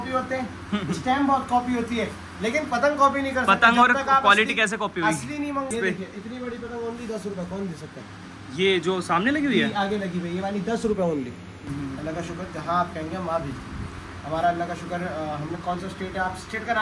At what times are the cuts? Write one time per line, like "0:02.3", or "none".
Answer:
0:05.7
0:11.5